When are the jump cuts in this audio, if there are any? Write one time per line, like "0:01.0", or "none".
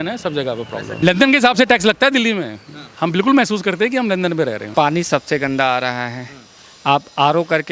0:00.9
0:04.6